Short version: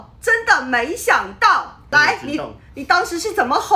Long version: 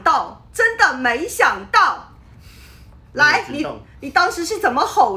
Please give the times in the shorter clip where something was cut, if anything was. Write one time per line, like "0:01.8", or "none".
0:01.8